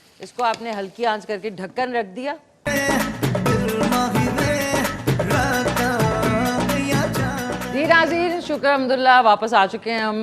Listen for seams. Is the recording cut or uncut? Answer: cut